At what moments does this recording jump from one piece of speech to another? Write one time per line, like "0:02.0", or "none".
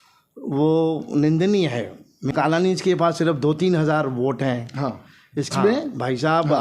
0:02.3
0:05.5

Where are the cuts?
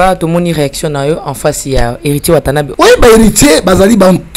0:02.7

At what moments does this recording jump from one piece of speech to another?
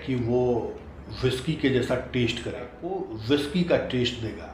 0:02.8

